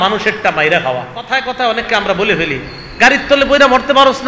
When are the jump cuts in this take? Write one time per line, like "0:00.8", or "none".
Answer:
0:01.4